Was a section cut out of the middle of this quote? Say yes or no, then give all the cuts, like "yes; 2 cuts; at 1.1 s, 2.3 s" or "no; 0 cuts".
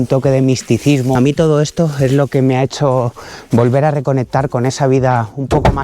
yes; 1 cut; at 1.1 s